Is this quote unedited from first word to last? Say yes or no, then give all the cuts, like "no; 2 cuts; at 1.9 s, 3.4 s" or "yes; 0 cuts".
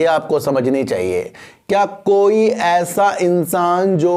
yes; 0 cuts